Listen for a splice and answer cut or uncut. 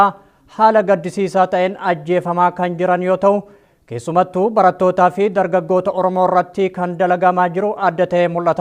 cut